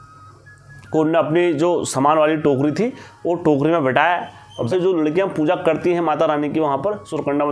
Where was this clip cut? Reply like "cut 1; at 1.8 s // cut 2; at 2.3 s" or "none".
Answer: cut 1; at 4.7 s